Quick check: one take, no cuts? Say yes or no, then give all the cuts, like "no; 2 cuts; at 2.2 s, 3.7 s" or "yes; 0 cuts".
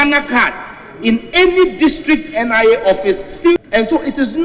no; 1 cut; at 3.6 s